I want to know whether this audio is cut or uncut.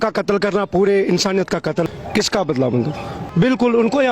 cut